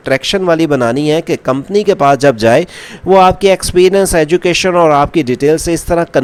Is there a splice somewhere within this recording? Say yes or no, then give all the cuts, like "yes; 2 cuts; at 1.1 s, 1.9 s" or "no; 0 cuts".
no; 0 cuts